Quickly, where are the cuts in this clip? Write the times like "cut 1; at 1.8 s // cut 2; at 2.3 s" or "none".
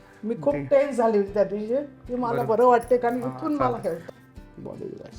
cut 1; at 4.1 s